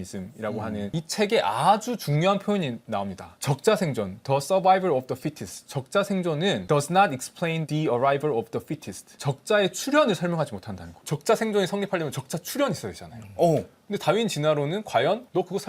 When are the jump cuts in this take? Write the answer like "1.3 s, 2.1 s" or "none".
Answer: 0.9 s